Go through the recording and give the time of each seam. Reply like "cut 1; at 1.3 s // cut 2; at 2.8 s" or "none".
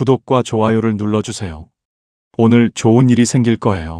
none

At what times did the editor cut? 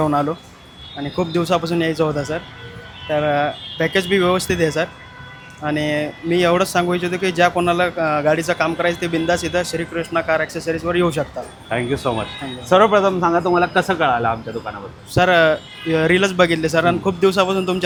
none

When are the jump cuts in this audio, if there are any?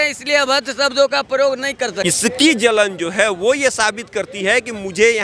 cut 1; at 2.0 s

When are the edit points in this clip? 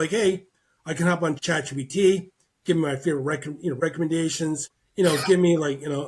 cut 1; at 1.4 s // cut 2; at 3.8 s // cut 3; at 4.8 s

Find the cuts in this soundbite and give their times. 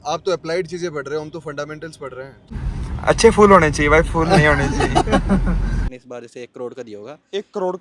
cut 1; at 2.5 s // cut 2; at 5.9 s

